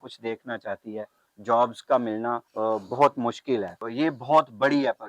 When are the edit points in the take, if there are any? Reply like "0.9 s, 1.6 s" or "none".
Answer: 1.2 s, 2.4 s, 3.8 s